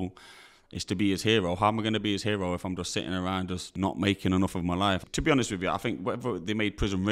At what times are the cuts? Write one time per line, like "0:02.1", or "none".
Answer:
0:03.6
0:05.0